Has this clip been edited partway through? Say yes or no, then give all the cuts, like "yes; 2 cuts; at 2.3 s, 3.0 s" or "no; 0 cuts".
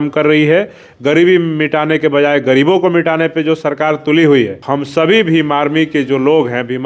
yes; 1 cut; at 4.6 s